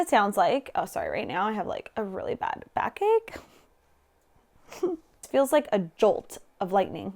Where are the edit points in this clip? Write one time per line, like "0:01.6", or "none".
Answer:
0:05.2